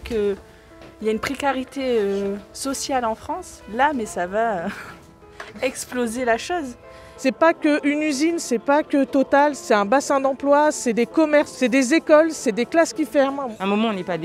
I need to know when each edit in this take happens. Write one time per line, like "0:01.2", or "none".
0:07.0
0:09.6
0:11.5
0:13.4